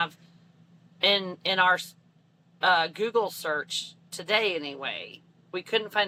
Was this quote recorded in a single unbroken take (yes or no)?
yes